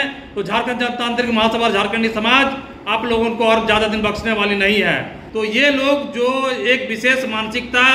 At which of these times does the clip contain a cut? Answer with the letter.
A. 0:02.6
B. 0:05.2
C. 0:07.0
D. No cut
B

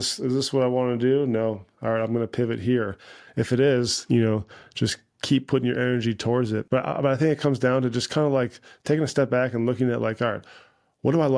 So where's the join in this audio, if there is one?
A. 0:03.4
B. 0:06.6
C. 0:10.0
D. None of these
B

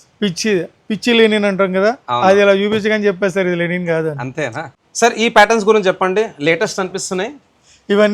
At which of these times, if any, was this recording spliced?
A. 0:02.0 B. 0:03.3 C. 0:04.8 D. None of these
C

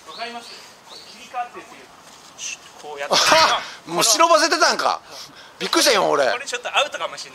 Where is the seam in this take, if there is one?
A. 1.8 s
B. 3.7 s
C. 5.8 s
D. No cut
A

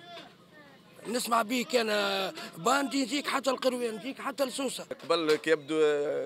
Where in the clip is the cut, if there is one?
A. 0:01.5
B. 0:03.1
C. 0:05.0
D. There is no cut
C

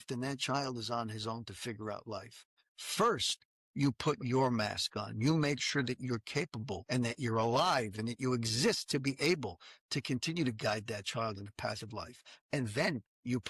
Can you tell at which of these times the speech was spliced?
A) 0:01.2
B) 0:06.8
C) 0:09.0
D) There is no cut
B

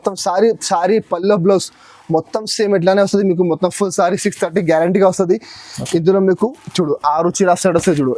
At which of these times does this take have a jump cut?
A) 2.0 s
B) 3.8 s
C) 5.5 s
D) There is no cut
D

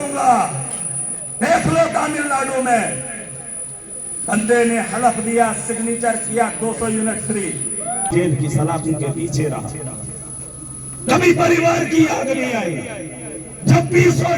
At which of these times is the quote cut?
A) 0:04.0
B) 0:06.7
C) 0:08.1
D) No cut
C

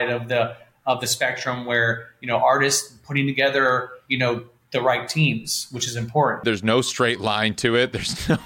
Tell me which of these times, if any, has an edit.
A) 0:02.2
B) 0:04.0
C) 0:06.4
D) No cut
C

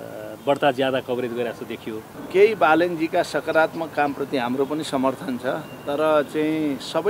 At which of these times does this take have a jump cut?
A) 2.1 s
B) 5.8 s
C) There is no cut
A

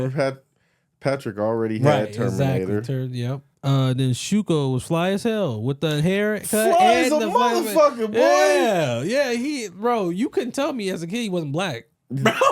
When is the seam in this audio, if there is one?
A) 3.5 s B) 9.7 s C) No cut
A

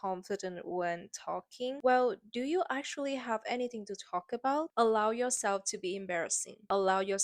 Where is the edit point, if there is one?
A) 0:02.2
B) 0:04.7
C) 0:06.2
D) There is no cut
B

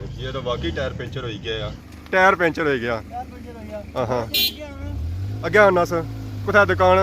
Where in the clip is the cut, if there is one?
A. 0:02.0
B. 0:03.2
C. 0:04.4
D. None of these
A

